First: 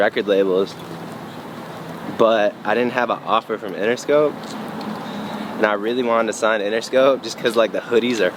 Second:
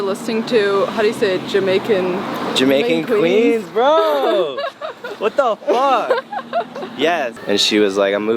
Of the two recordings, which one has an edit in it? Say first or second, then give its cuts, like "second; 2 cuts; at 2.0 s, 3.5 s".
second; 1 cut; at 7.4 s